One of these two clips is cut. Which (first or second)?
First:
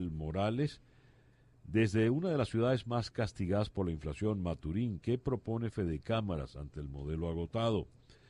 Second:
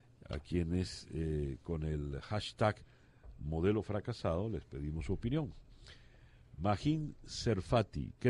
first